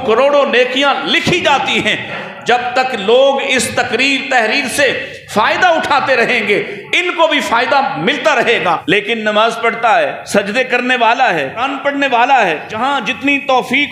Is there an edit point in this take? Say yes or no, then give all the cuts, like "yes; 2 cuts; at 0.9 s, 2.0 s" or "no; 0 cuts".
yes; 5 cuts; at 2.2 s, 8.8 s, 10.2 s, 11.7 s, 12.7 s